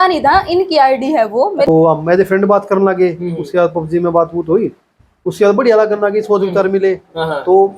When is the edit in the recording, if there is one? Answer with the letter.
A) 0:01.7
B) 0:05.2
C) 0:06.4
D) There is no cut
A